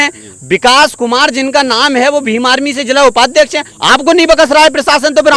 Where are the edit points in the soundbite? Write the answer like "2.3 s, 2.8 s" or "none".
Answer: none

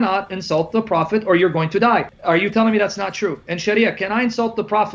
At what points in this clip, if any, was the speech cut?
none

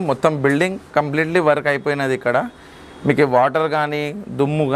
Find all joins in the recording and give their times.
none

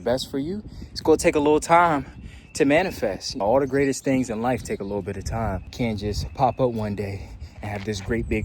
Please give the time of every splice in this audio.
3.3 s, 5.7 s

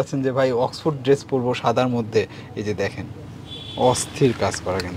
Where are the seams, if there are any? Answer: none

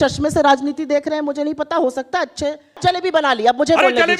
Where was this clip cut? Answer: 2.8 s

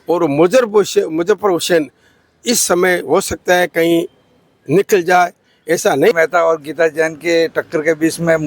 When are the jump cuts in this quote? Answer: 6.1 s

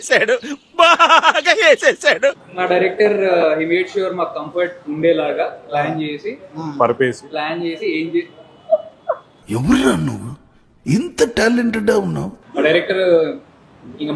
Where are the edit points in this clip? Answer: 2.5 s, 12.4 s

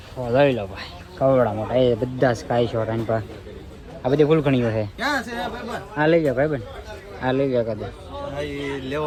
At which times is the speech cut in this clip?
none

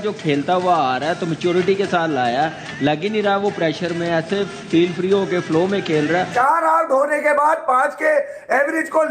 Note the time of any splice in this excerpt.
6.3 s

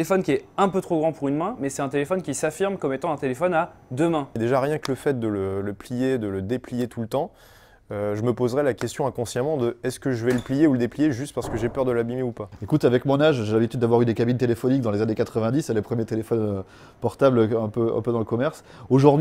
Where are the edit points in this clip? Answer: 4.4 s, 12.5 s

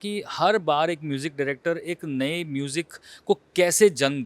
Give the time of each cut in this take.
none

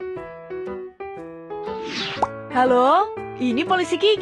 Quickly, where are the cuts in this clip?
2.4 s

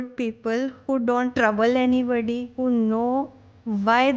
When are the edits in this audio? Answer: 1.3 s, 2.5 s

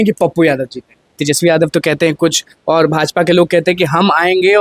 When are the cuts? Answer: 1.2 s

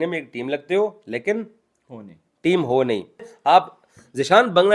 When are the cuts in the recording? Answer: 3.3 s

